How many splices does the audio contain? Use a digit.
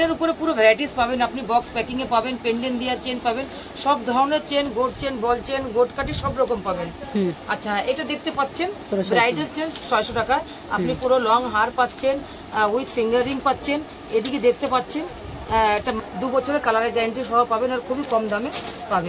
2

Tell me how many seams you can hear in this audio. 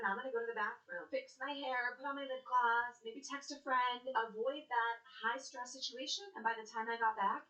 0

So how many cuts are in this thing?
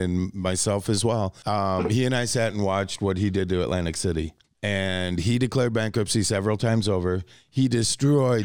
2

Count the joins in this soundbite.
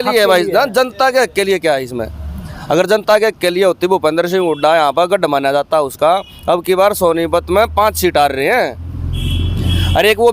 0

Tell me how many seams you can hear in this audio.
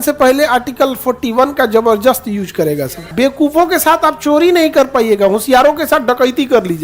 1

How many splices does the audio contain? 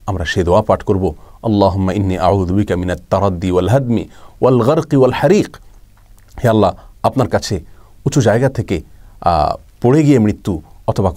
0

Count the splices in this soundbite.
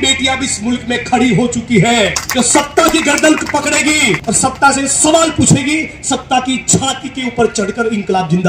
2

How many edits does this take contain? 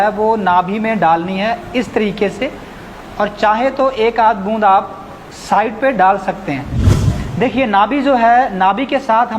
1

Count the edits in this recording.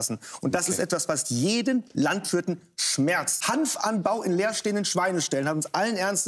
1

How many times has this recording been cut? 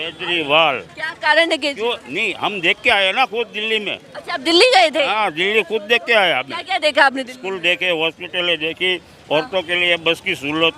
0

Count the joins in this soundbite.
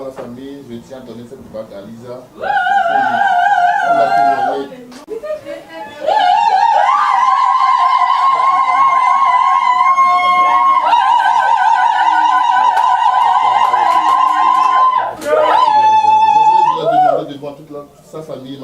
1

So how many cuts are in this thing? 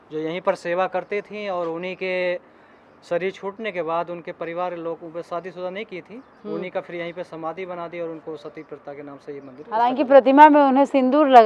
0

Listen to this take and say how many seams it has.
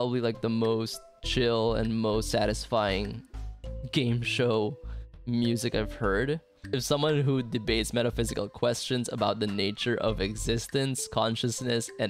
1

